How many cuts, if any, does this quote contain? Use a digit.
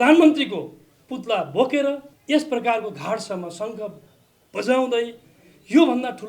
1